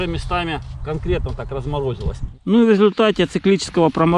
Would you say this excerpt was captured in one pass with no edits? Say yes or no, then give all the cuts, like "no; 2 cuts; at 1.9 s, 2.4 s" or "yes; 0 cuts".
no; 1 cut; at 2.2 s